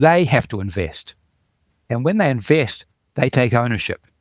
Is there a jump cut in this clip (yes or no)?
no